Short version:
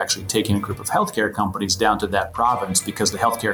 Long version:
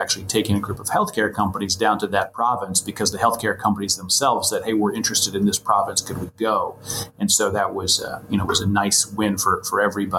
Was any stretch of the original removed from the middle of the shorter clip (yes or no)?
no